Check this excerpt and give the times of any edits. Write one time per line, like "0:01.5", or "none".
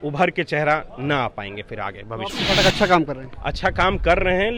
0:02.4